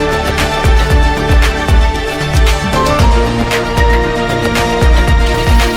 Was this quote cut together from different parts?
no; 0 cuts

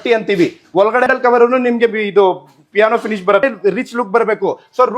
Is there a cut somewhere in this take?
yes; 2 cuts; at 1.1 s, 3.4 s

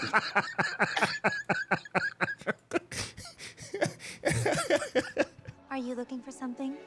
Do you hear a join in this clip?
yes; 1 cut; at 5.6 s

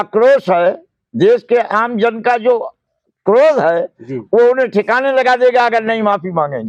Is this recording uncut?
yes; 0 cuts

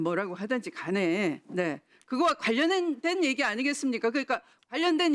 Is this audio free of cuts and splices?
yes; 0 cuts

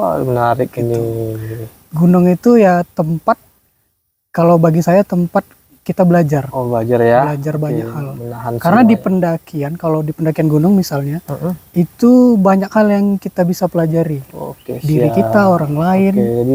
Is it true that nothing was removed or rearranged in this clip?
yes; 0 cuts

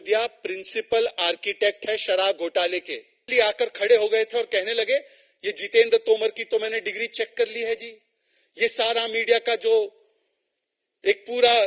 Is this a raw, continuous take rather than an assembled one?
no; 1 cut; at 3.2 s

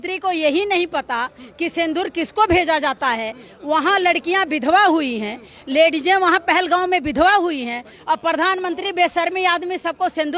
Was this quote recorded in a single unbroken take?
yes; 0 cuts

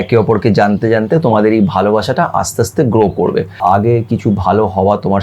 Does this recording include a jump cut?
yes; 1 cut; at 3.6 s

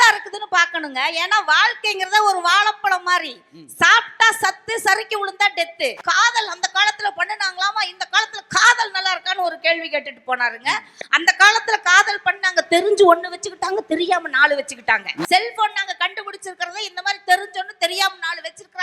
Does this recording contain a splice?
yes; 2 cuts; at 6.0 s, 15.2 s

